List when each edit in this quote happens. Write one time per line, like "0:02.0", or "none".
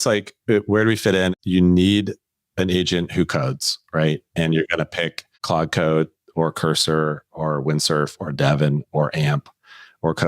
0:01.3
0:05.3

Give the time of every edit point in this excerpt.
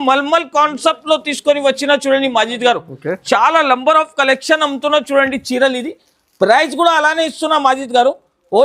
none

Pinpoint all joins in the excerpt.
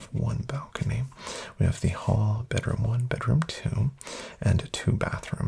none

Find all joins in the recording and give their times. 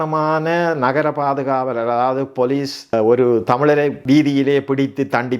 0:02.9
0:04.0

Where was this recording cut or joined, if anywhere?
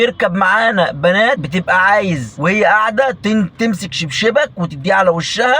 0:01.4

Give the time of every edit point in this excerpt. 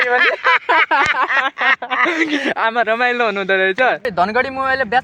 0:04.1

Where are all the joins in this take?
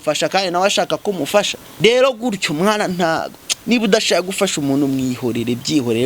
0:01.6

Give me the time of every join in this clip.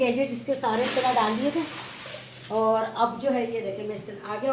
none

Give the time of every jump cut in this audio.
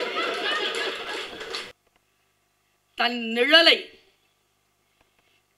0:01.7

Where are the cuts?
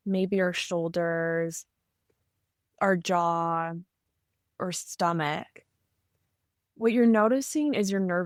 none

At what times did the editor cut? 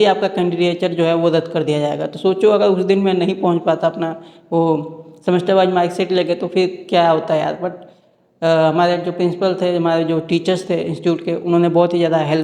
none

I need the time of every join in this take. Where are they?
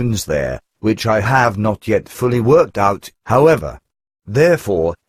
0:02.7

